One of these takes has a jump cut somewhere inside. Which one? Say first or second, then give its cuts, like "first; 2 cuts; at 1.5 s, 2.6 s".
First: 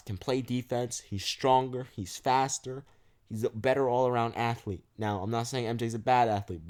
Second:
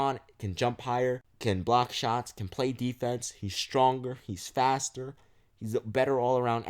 second; 1 cut; at 1.3 s